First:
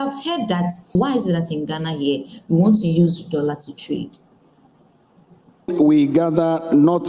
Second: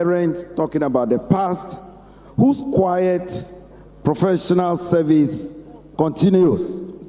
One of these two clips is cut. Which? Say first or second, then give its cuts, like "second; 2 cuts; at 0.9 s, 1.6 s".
first; 2 cuts; at 1.0 s, 5.7 s